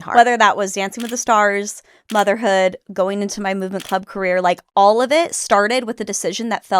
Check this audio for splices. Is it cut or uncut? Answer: uncut